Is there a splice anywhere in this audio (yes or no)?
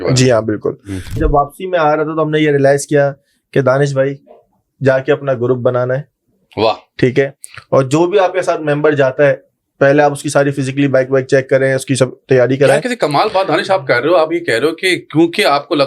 yes